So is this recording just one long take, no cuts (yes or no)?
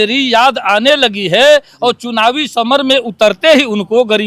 yes